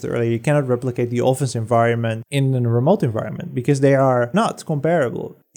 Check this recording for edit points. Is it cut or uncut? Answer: cut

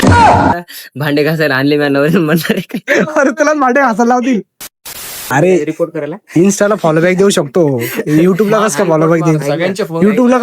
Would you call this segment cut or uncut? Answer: cut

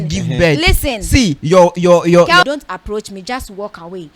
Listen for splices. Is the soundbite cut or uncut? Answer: cut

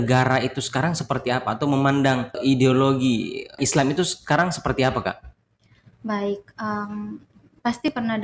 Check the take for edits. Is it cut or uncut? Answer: cut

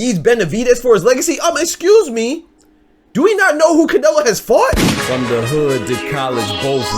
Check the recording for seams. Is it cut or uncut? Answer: cut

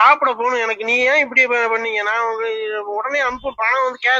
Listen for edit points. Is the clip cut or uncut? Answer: uncut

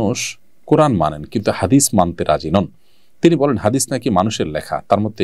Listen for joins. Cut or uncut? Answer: uncut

